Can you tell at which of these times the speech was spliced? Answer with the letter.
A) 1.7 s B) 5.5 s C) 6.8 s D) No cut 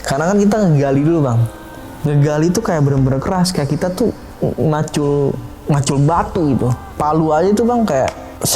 C